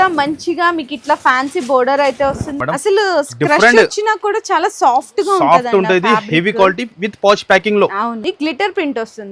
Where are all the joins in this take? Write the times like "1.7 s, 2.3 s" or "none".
2.6 s, 8.2 s